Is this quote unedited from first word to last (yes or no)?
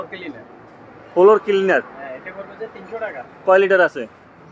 yes